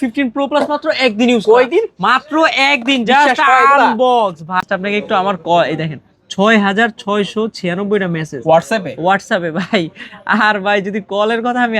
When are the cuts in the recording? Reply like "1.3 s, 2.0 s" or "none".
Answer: 4.6 s